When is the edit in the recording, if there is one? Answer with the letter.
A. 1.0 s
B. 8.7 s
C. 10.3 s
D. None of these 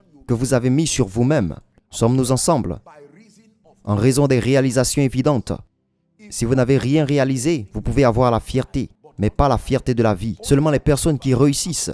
C